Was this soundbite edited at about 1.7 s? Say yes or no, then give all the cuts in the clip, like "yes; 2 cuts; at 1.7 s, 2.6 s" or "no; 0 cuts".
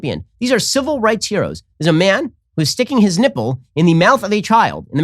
yes; 1 cut; at 1.7 s